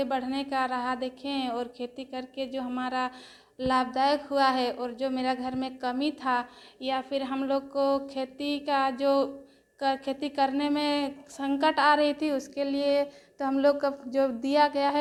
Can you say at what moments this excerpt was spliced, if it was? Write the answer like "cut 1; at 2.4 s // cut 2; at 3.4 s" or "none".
none